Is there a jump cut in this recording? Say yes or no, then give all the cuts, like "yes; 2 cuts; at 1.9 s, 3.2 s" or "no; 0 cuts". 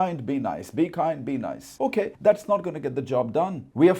yes; 1 cut; at 2.0 s